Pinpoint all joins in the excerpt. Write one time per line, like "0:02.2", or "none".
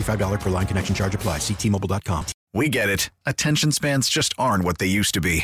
0:02.4